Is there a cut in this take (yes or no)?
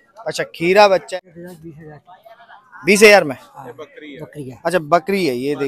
yes